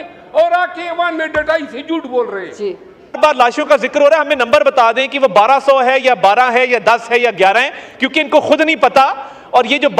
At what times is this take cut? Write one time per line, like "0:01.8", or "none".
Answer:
0:03.2